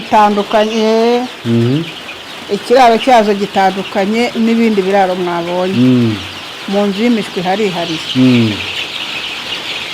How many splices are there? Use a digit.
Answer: 0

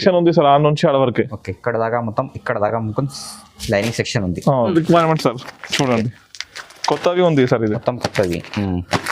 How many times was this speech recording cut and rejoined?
1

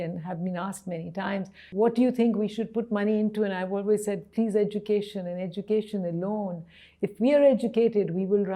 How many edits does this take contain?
1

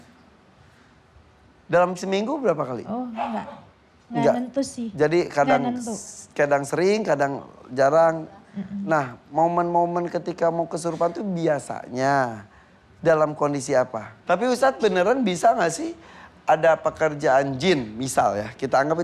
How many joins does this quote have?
1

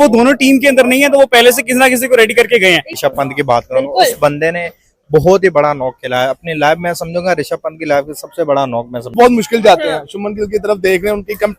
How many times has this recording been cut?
2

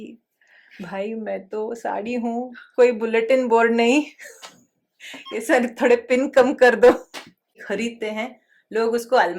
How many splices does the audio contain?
1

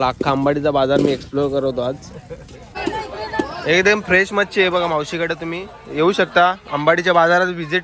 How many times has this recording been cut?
1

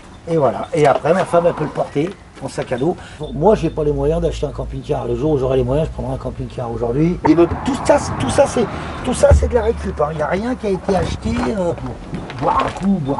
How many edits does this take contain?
3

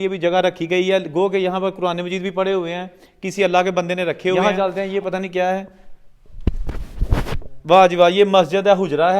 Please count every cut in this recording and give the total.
1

